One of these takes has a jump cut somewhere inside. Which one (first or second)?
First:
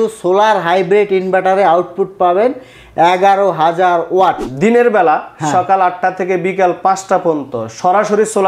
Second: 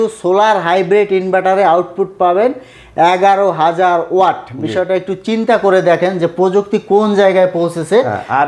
first